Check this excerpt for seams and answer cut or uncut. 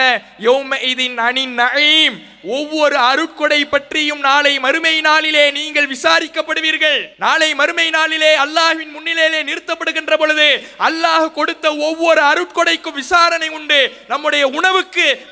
cut